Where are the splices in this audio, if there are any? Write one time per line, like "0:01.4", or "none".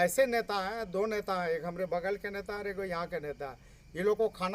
none